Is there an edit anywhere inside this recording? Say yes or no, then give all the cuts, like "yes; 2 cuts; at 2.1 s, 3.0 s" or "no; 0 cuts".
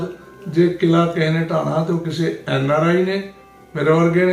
no; 0 cuts